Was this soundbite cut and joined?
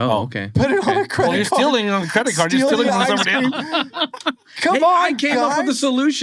no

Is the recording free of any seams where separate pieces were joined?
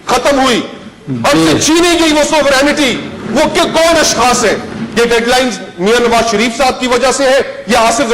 no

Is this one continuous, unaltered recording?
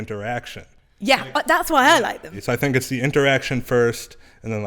no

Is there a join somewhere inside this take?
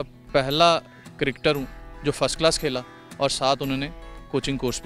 no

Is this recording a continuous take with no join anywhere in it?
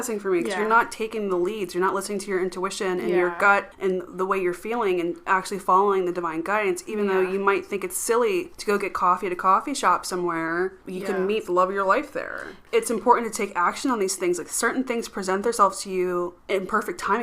no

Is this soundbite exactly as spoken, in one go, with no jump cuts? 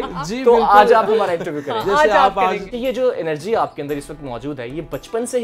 no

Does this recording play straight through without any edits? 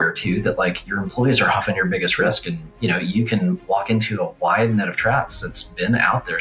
yes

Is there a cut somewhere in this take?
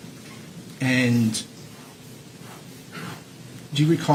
no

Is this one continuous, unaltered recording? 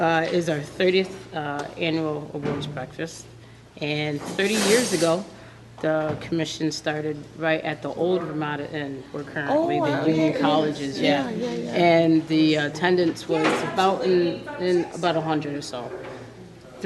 no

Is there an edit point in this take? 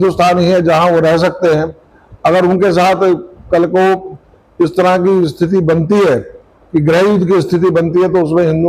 no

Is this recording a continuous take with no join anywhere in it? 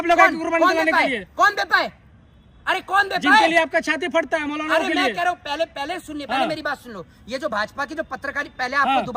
yes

